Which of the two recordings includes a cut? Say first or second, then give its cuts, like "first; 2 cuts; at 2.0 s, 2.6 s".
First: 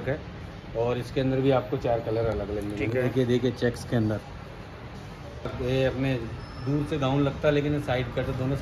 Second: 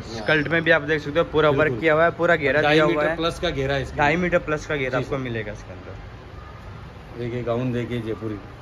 first; 1 cut; at 5.5 s